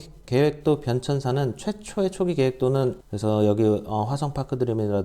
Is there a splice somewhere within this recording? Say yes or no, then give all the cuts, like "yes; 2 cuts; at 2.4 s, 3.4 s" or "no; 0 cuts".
yes; 1 cut; at 3.0 s